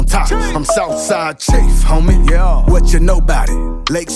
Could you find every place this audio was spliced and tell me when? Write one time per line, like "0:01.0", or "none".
none